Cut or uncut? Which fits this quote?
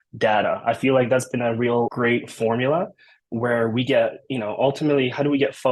cut